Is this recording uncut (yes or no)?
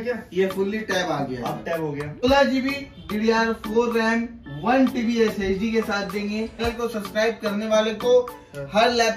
no